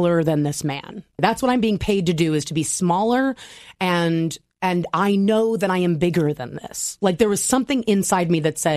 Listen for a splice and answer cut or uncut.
cut